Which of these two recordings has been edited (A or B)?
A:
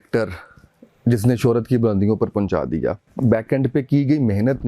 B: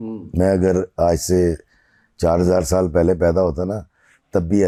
A